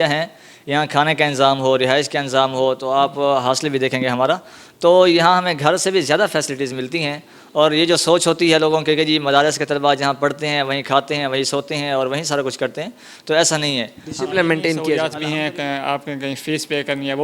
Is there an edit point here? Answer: yes; 1 cut; at 15.0 s

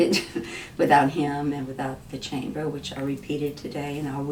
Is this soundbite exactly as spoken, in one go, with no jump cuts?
yes; 0 cuts

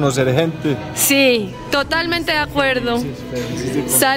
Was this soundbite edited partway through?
no; 0 cuts

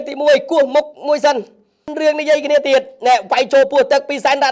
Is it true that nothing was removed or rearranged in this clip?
no; 1 cut; at 1.9 s

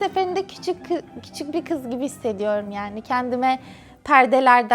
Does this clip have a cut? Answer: no; 0 cuts

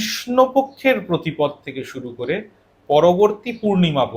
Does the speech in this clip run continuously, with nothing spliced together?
yes; 0 cuts

